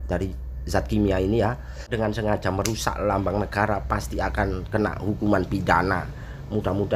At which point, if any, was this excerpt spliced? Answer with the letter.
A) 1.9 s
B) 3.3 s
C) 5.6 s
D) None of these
A